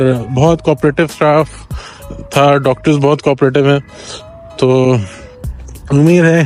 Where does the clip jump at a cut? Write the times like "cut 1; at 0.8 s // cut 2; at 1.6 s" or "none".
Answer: none